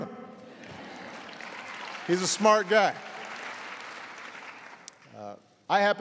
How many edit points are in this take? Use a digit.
0